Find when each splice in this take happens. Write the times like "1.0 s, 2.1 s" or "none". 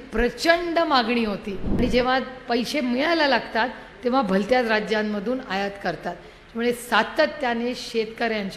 1.8 s